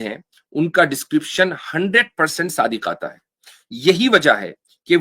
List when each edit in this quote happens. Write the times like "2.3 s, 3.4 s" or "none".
none